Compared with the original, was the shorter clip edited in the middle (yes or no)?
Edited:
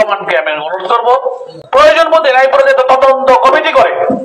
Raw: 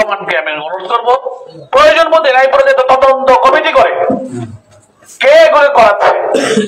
no